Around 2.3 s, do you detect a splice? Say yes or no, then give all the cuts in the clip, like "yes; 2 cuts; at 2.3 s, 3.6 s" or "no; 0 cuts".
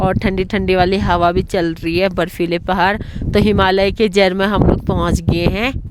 no; 0 cuts